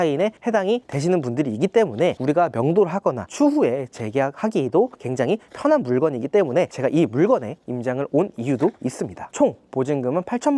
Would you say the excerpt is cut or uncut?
cut